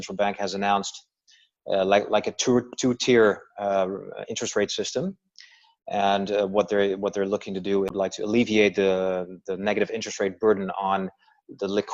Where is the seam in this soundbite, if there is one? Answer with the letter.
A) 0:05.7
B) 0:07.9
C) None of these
B